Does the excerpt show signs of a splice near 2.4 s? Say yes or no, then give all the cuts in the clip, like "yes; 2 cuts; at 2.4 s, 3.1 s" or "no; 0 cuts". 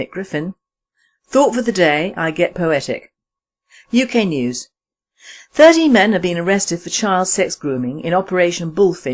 no; 1 cut; at 6.3 s